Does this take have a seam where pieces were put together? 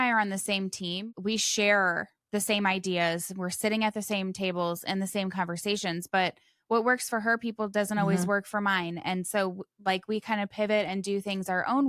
yes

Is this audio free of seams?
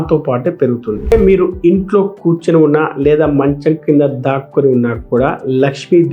no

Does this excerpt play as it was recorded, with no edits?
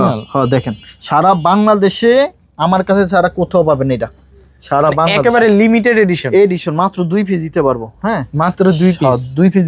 yes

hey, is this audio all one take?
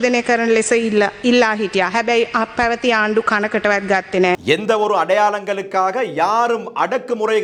yes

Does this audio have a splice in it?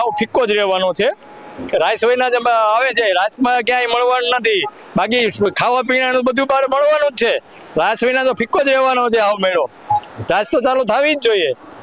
no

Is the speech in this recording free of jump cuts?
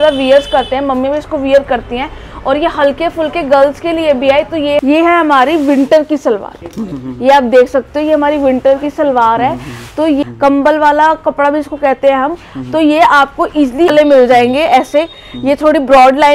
no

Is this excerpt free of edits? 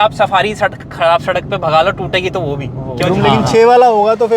no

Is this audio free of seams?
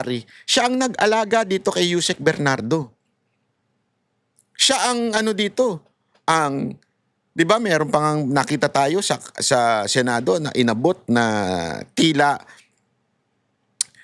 yes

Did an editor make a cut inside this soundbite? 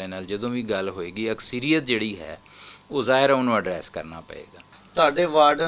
yes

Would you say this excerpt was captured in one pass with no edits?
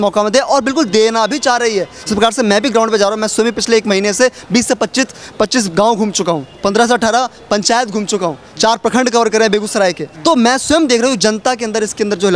no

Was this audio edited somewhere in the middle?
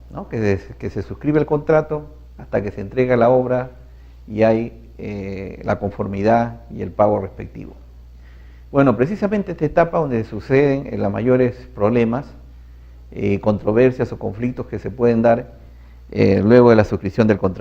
yes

